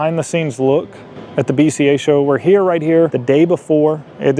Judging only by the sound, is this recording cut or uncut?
uncut